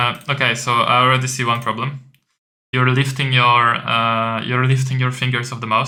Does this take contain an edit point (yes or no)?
no